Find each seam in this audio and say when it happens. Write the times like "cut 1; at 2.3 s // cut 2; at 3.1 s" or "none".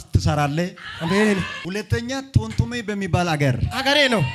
cut 1; at 1.6 s

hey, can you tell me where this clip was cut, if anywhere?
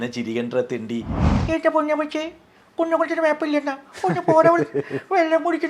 cut 1; at 1.2 s

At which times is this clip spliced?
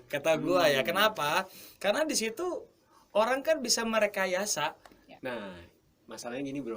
cut 1; at 5.1 s

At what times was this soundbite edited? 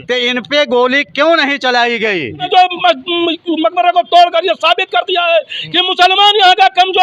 cut 1; at 2.5 s

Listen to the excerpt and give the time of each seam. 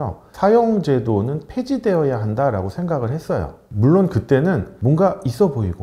cut 1; at 4.7 s

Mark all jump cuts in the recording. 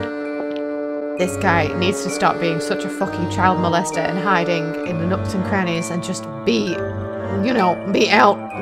none

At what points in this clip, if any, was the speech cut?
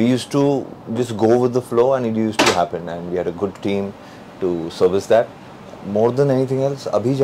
none

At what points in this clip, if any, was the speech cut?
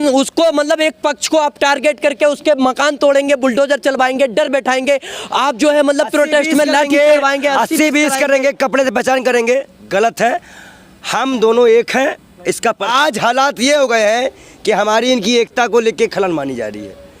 cut 1; at 12.9 s

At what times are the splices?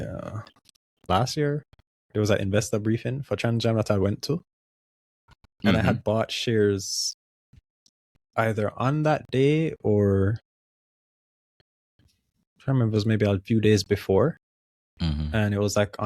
cut 1; at 1.1 s

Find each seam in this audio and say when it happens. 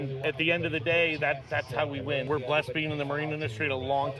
cut 1; at 2.2 s

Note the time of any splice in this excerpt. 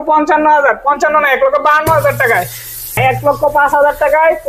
cut 1; at 3.0 s

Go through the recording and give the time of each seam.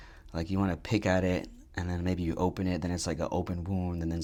none

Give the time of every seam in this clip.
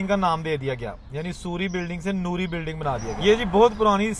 cut 1; at 3.1 s

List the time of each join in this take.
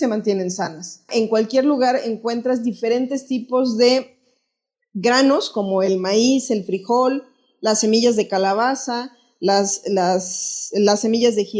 cut 1; at 1.1 s

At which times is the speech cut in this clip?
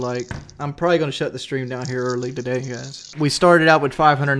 cut 1; at 3.1 s

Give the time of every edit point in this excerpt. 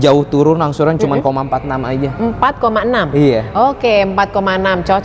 none

